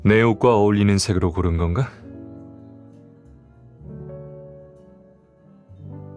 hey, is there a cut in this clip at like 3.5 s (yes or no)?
no